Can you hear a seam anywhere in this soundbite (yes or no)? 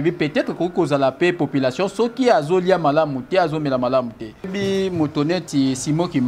yes